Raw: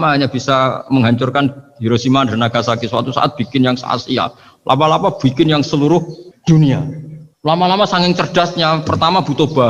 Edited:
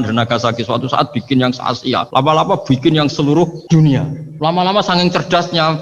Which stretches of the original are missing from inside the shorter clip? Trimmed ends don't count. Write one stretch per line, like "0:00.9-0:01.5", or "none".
0:04.3-0:04.6
0:06.4-0:06.9